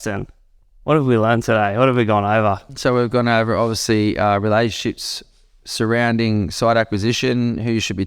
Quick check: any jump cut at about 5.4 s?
no; 1 cut; at 2.7 s

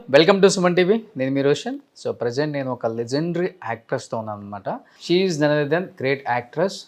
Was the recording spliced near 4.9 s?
yes; 1 cut; at 4.9 s

